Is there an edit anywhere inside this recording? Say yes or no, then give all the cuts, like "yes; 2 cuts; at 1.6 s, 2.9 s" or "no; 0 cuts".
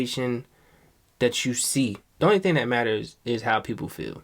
yes; 1 cut; at 2.0 s